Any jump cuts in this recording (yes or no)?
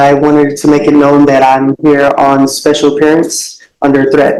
no